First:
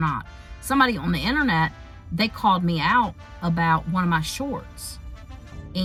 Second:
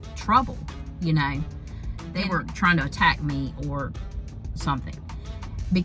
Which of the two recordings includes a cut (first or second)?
second